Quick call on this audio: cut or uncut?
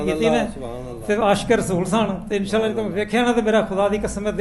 uncut